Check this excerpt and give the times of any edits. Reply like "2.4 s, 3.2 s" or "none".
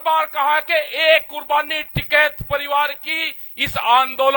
none